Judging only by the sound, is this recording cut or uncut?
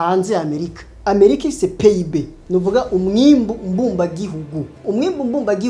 cut